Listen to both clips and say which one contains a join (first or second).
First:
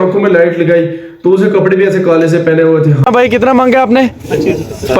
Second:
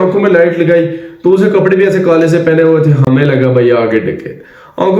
first